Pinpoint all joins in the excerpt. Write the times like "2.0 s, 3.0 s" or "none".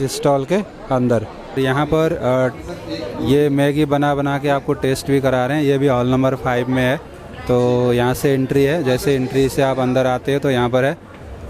1.6 s